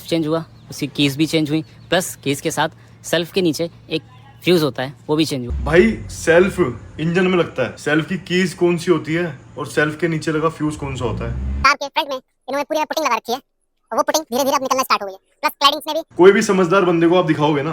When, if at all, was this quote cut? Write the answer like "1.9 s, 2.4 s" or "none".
5.5 s, 11.6 s, 16.1 s